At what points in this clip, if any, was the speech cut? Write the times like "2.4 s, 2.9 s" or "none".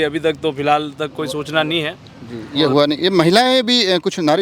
none

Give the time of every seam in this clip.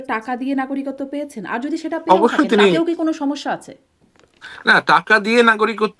none

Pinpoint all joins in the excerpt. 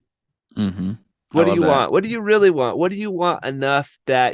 1.1 s

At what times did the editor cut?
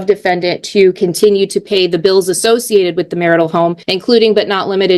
3.9 s

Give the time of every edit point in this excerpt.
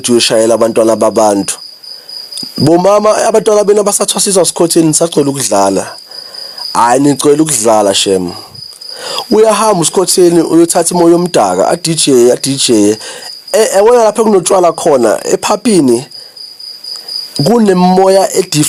none

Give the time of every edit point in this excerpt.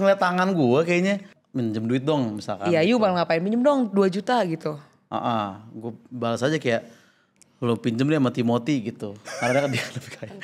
1.3 s

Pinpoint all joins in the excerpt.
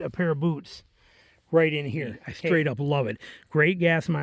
2.3 s

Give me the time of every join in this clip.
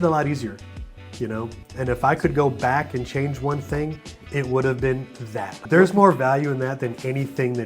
5.5 s

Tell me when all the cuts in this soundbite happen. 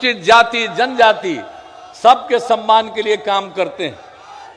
none

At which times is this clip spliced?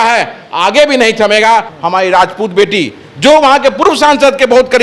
1.7 s

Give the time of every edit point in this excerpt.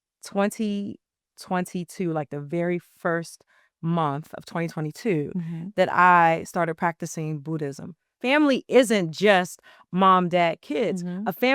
8.1 s

